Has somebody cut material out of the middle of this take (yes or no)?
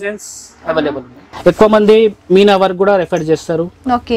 yes